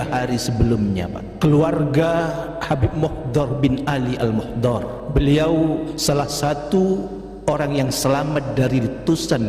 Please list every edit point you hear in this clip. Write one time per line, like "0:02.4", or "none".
0:01.2
0:05.0
0:06.0